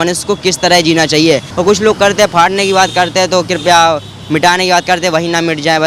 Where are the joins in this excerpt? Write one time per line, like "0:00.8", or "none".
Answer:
0:01.5